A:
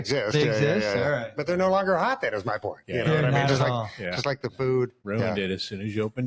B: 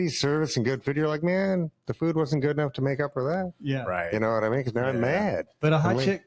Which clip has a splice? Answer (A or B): A